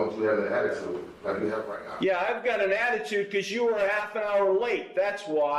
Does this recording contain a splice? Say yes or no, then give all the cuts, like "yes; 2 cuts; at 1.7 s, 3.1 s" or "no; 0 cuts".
no; 0 cuts